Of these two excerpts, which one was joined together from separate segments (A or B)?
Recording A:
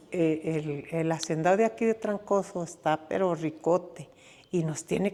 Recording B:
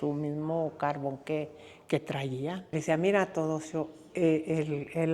B